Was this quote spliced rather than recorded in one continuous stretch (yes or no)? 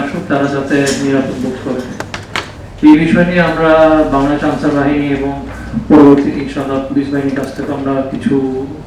yes